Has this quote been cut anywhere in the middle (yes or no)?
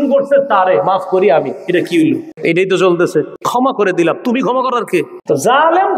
yes